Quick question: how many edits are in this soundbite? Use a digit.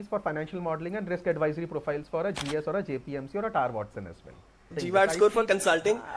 1